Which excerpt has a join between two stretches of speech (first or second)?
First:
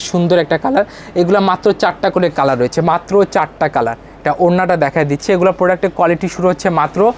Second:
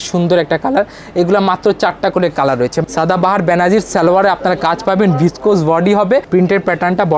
second